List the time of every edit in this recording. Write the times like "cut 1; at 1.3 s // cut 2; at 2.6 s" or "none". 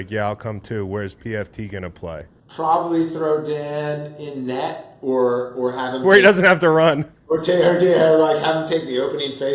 cut 1; at 2.4 s